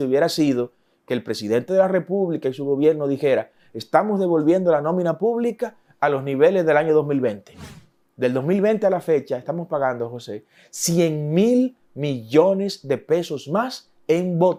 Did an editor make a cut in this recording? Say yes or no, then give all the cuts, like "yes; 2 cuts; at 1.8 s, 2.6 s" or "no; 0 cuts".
no; 0 cuts